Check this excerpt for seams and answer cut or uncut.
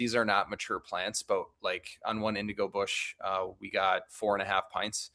uncut